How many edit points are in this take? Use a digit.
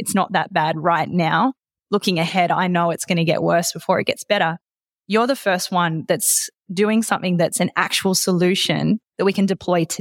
1